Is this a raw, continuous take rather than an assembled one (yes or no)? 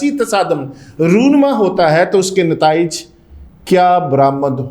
yes